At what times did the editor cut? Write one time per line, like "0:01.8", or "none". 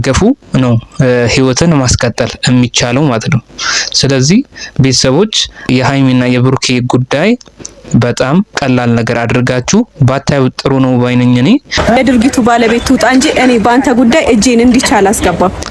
0:08.5
0:11.7